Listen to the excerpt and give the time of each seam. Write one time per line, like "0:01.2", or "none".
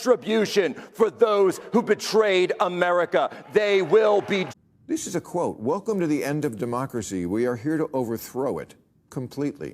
0:04.4